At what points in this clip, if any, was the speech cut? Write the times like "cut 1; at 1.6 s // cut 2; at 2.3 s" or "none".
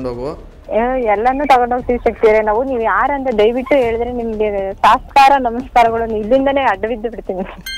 none